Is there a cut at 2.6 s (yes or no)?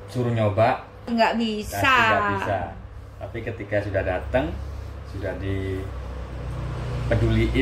no